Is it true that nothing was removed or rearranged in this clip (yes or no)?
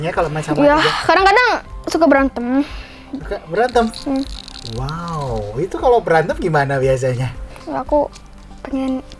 yes